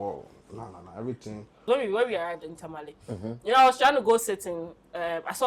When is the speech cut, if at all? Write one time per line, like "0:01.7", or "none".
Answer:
0:01.6